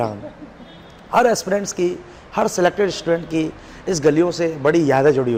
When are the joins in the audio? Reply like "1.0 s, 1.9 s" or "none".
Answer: none